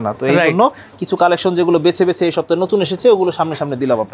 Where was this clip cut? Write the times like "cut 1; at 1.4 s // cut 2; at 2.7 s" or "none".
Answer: none